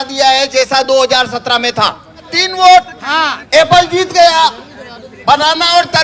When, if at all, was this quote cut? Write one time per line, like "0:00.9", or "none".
0:02.4